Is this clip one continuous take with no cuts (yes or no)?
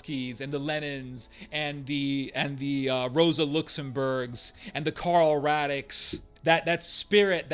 yes